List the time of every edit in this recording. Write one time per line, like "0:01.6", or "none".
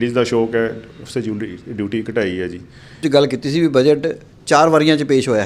0:03.0